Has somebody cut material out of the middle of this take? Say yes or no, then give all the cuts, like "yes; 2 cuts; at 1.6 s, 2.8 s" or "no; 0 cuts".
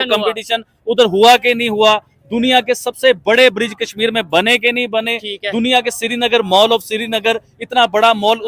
no; 0 cuts